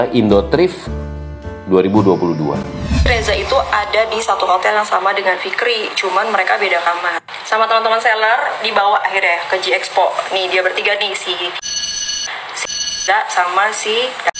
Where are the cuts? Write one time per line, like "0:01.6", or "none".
none